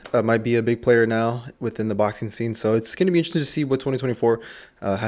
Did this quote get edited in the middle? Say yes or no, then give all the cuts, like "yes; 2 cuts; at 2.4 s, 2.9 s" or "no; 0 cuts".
no; 0 cuts